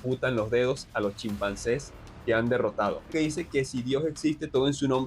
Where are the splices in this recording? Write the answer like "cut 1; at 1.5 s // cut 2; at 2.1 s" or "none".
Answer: cut 1; at 3.0 s